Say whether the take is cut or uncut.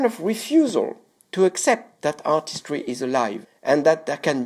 uncut